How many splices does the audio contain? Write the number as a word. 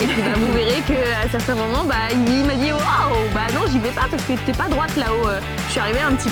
zero